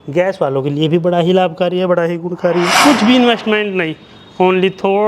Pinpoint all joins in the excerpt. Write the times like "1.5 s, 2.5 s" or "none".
2.7 s